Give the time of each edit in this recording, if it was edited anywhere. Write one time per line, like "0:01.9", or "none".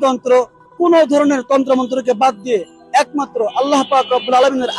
none